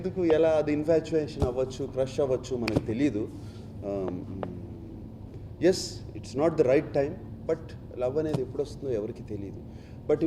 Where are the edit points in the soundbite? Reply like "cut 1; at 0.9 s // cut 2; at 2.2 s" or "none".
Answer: none